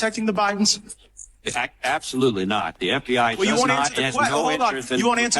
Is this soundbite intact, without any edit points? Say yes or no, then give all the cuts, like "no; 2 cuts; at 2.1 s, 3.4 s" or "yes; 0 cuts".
yes; 0 cuts